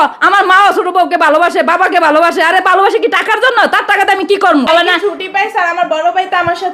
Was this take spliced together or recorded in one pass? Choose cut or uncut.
cut